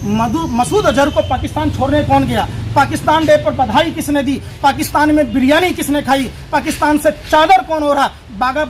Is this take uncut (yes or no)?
yes